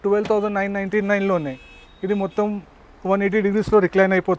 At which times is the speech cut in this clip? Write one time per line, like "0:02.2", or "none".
none